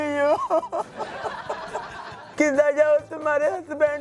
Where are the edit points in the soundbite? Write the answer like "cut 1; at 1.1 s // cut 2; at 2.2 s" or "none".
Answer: cut 1; at 2.0 s